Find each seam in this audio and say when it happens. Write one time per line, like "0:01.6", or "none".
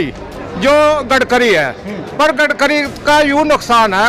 none